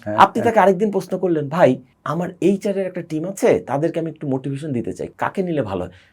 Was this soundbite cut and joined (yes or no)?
yes